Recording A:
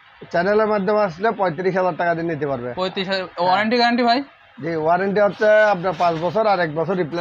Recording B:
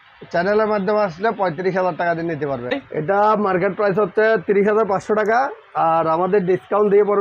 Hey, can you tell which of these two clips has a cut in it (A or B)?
B